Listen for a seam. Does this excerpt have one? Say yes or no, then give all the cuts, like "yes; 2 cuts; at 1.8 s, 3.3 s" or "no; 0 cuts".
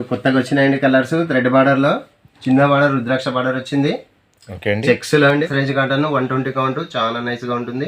yes; 1 cut; at 5.5 s